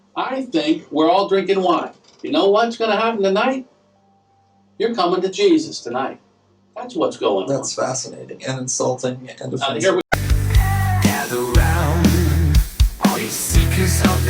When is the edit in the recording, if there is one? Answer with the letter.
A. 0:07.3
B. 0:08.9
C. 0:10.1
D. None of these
C